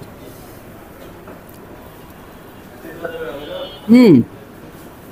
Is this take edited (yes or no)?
no